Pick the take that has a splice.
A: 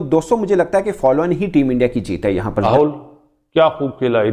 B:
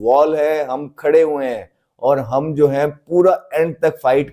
A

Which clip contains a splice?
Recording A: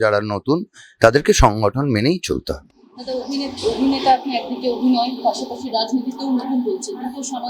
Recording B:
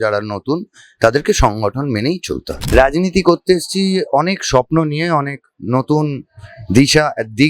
B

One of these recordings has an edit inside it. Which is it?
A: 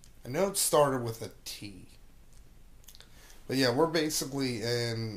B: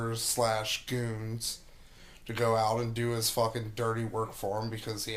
A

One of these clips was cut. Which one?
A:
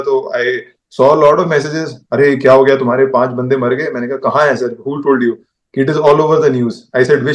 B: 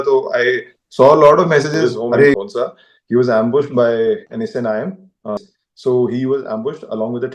B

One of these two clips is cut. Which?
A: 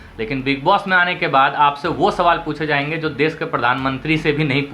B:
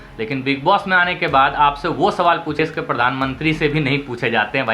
B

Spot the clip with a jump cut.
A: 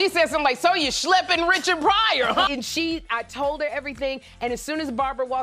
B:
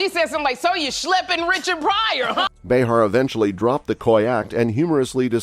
A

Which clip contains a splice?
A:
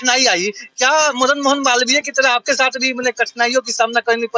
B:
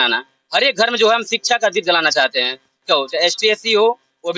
B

